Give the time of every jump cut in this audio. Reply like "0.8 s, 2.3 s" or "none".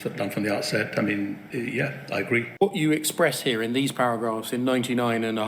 1.5 s, 2.5 s